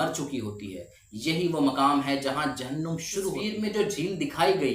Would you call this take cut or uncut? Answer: cut